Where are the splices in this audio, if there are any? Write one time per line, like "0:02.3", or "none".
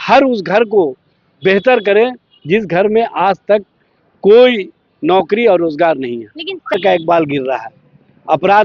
0:06.7

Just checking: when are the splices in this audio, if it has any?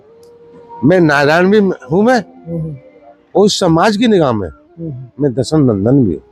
none

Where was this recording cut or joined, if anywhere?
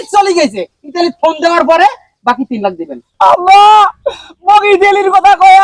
0:03.0

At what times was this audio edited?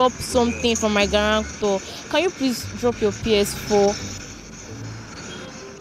none

